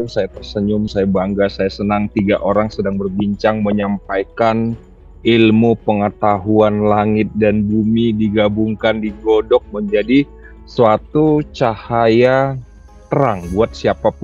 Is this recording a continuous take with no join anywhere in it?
yes; 0 cuts

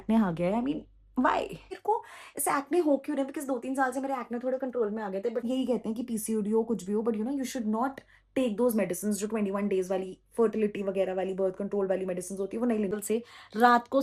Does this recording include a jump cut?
yes; 3 cuts; at 1.7 s, 5.4 s, 12.9 s

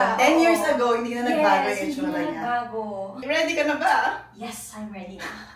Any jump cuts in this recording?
yes; 1 cut; at 3.2 s

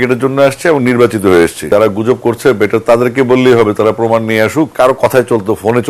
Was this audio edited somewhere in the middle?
yes; 2 cuts; at 1.7 s, 4.7 s

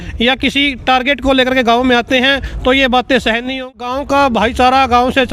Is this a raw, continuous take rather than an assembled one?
no; 1 cut; at 3.8 s

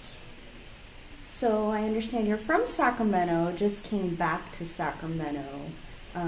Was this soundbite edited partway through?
no; 0 cuts

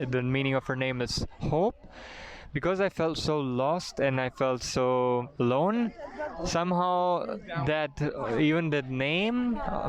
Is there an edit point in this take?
no; 0 cuts

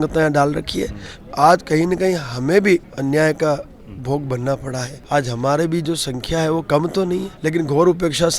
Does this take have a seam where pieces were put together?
yes; 4 cuts; at 1.1 s, 2.9 s, 4.9 s, 7.3 s

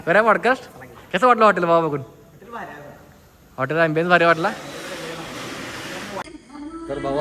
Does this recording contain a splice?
yes; 1 cut; at 6.2 s

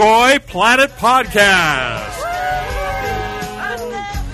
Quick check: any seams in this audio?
no; 0 cuts

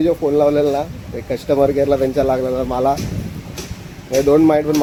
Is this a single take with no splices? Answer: yes; 0 cuts

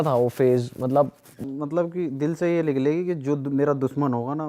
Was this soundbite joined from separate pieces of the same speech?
yes; 1 cut; at 1.4 s

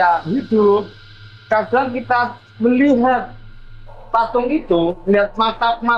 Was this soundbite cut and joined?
no; 0 cuts

